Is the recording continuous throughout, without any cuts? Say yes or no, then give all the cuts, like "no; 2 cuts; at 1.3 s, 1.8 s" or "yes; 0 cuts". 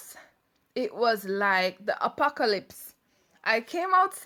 yes; 0 cuts